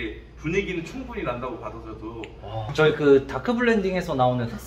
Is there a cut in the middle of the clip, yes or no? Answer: yes